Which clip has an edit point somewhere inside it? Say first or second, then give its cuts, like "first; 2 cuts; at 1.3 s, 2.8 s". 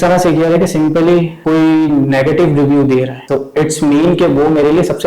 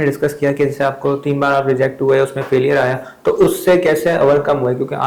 first; 2 cuts; at 1.3 s, 3.2 s